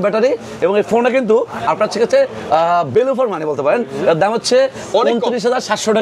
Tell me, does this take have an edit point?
no; 0 cuts

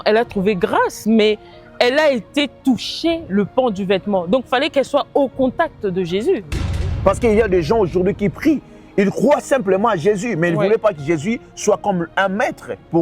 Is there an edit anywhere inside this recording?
yes; 1 cut; at 6.6 s

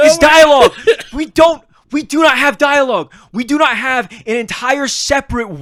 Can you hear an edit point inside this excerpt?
no; 0 cuts

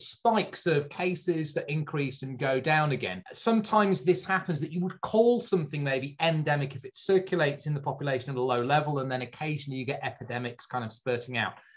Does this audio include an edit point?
no; 0 cuts

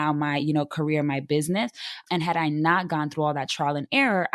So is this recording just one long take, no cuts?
yes; 0 cuts

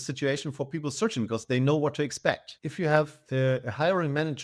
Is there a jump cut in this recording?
yes; 1 cut; at 2.5 s

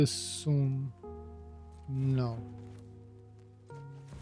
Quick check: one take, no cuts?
no; 1 cut; at 2.4 s

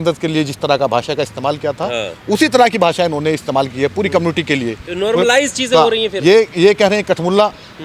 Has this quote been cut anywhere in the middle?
no; 0 cuts

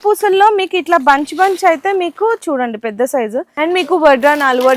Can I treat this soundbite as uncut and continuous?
no; 1 cut; at 3.5 s

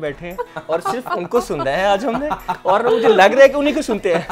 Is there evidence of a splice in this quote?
no; 0 cuts

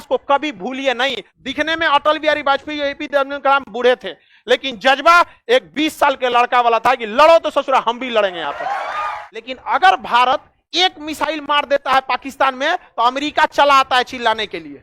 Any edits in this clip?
yes; 2 cuts; at 1.3 s, 9.5 s

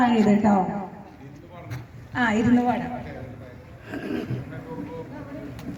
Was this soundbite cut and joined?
no; 0 cuts

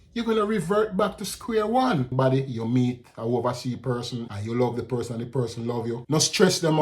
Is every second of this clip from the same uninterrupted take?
no; 3 cuts; at 2.1 s, 4.2 s, 6.0 s

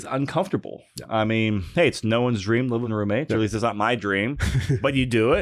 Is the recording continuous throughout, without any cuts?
no; 1 cut; at 2.9 s

